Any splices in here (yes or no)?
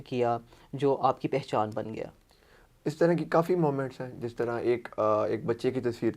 no